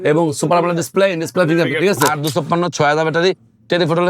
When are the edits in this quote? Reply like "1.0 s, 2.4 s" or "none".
2.1 s